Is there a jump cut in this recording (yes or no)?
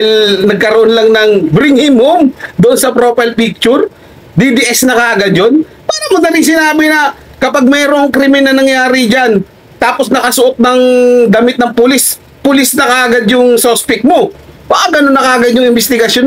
no